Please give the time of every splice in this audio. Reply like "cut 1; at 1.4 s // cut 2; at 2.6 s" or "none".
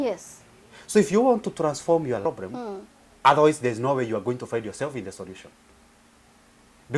cut 1; at 2.2 s